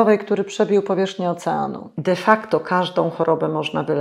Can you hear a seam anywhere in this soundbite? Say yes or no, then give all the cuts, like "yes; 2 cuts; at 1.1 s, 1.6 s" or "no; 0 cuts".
yes; 1 cut; at 1.9 s